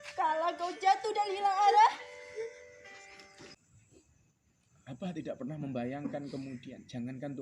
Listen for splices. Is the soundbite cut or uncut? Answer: cut